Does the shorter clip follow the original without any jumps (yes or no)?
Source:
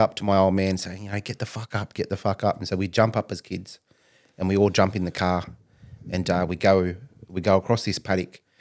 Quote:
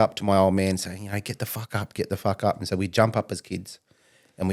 yes